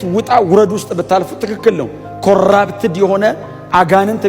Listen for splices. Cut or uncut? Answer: uncut